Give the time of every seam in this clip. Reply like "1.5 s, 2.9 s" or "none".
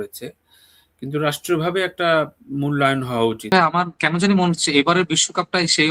3.5 s